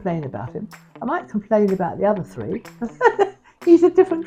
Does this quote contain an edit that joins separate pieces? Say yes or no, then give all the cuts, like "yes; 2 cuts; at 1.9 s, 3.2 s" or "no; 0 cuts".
no; 0 cuts